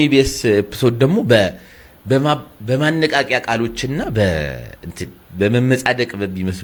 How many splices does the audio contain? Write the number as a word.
zero